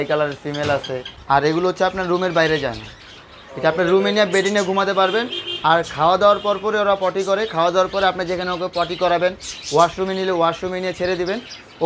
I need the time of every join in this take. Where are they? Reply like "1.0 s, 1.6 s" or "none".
1.1 s

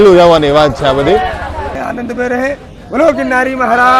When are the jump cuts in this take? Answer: 1.7 s

